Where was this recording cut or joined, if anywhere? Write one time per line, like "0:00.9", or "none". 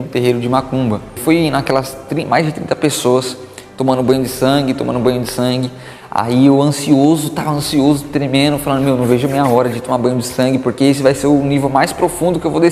0:01.1